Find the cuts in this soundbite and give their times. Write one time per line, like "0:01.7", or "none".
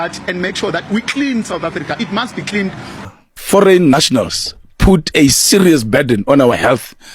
0:03.0